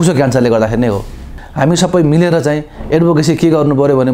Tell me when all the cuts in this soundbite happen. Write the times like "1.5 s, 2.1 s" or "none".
1.2 s

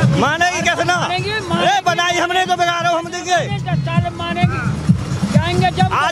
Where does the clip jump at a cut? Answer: none

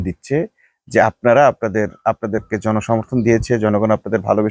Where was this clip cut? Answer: none

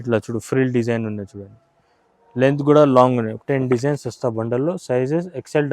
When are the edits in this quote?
3.3 s

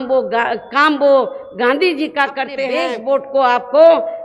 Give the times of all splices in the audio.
2.7 s

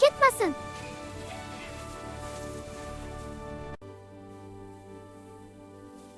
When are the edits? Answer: 3.0 s

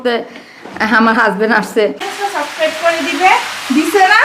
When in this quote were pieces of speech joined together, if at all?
2.1 s

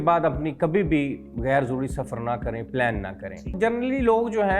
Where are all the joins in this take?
3.5 s

